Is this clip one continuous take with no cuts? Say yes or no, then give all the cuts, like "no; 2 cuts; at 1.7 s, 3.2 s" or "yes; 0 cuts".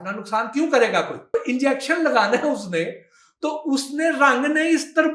no; 1 cut; at 1.3 s